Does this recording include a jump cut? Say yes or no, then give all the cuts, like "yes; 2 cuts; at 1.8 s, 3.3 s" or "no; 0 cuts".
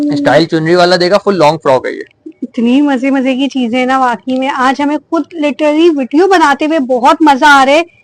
no; 0 cuts